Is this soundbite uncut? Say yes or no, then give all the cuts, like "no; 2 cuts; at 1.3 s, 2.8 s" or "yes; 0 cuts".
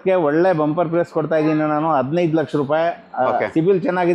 yes; 0 cuts